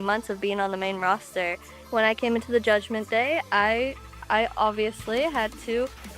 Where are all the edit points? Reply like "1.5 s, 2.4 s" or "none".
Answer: 1.8 s